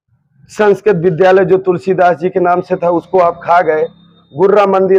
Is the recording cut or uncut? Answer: uncut